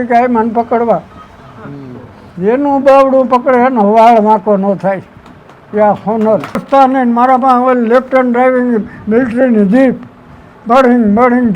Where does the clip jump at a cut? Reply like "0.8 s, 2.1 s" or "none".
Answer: 6.6 s

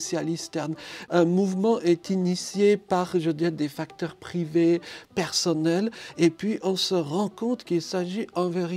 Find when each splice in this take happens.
1.0 s

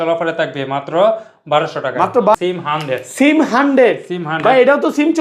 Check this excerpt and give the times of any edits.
2.3 s

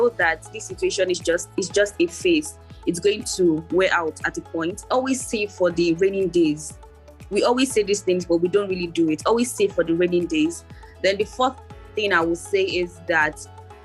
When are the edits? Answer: 4.8 s

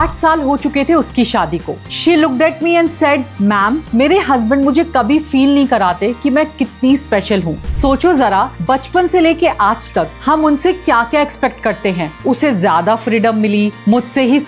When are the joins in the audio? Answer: 1.8 s, 7.6 s, 12.1 s

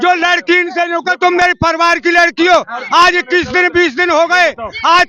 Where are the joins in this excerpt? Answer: none

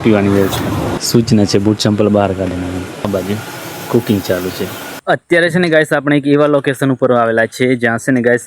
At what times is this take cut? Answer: 0.9 s, 3.1 s, 5.0 s

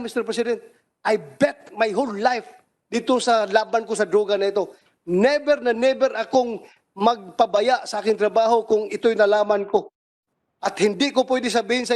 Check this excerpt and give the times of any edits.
none

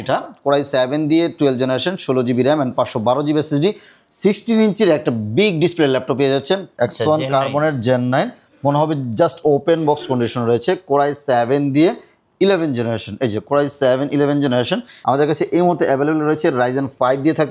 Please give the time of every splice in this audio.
6.7 s, 14.9 s

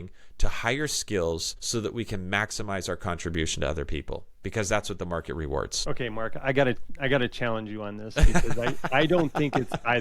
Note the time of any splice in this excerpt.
1.5 s, 5.8 s

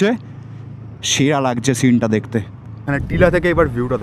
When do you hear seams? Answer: 2.8 s

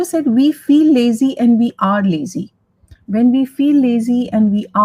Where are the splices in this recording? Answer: none

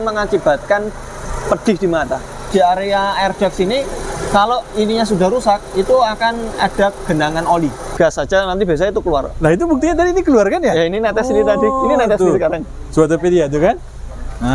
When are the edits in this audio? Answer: 2.5 s, 7.9 s

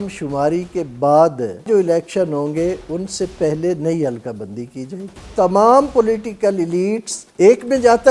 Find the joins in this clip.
1.6 s, 5.3 s, 7.2 s

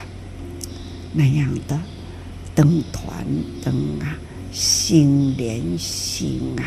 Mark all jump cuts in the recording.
none

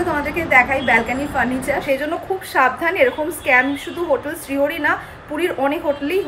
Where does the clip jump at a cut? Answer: 1.8 s

